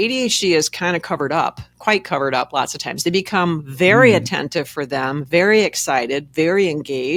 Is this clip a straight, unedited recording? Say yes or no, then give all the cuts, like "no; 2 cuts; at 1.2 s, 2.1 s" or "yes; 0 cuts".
yes; 0 cuts